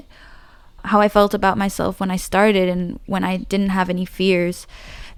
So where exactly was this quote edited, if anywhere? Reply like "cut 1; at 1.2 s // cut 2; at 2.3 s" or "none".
none